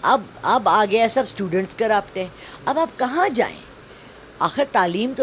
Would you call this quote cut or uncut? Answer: uncut